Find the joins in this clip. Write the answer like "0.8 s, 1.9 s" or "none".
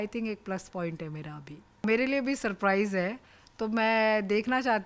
1.8 s